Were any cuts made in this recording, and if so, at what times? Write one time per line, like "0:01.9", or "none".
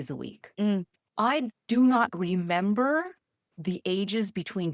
0:00.9